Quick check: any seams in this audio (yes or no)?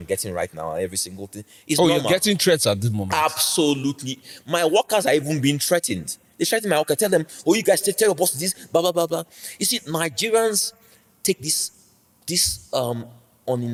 no